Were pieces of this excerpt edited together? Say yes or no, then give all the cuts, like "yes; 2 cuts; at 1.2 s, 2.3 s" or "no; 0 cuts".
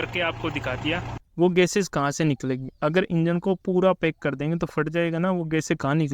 yes; 1 cut; at 1.1 s